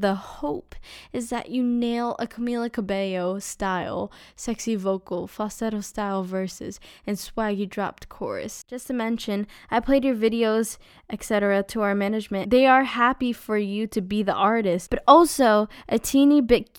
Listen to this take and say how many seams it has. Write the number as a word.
three